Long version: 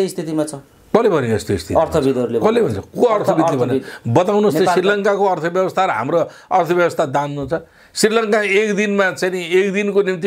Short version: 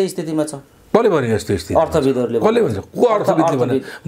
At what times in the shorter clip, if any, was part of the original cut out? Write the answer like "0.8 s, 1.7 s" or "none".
none